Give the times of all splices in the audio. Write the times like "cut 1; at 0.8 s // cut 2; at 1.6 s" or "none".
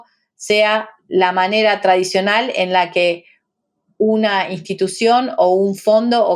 cut 1; at 1.0 s